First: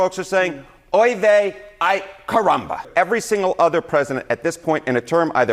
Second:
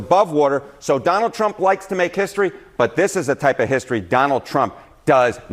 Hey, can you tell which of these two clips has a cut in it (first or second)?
first